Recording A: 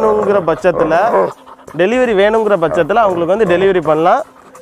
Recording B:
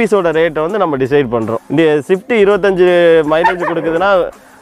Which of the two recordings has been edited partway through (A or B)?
B